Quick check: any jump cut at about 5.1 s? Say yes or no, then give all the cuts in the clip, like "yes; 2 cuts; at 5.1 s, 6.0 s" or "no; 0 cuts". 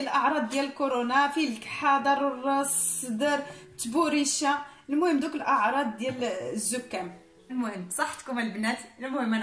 no; 1 cut; at 7.5 s